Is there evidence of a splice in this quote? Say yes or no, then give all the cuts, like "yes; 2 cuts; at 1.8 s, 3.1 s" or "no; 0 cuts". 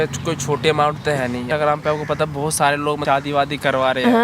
yes; 2 cuts; at 1.4 s, 3.0 s